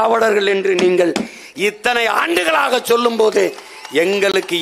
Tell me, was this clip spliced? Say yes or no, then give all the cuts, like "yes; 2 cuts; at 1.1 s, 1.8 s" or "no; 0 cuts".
no; 0 cuts